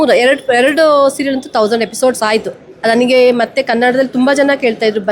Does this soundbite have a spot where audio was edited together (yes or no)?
no